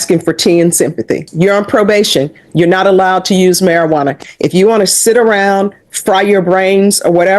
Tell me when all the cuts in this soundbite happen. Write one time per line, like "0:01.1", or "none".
0:01.3